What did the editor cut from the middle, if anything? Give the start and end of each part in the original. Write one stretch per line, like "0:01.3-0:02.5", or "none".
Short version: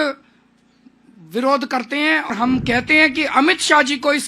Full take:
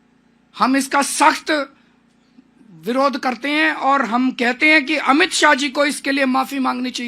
0:03.8-0:04.0